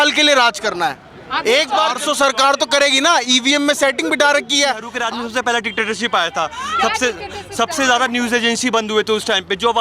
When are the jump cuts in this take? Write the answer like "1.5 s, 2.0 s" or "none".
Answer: 2.0 s, 4.9 s

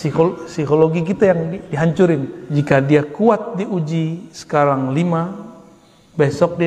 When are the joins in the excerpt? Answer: 2.4 s

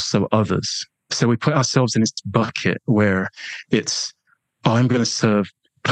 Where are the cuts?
1.1 s

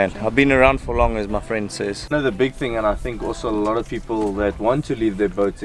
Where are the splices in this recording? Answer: 2.0 s

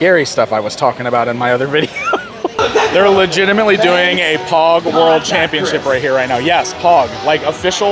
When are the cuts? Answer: 2.6 s

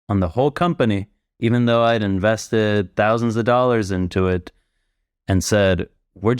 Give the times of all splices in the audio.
none

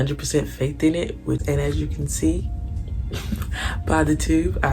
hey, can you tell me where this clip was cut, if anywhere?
1.4 s

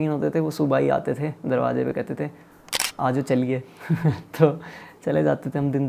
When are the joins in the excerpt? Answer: none

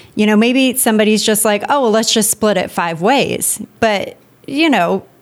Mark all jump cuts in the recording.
3.7 s

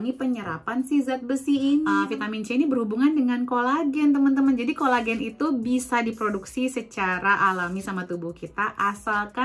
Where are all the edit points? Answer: 2.0 s

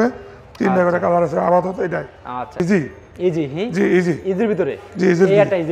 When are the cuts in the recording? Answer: 2.6 s

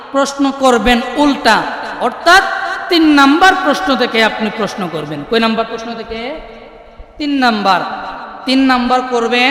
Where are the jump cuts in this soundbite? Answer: none

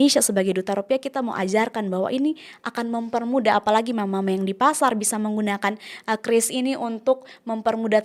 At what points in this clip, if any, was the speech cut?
none

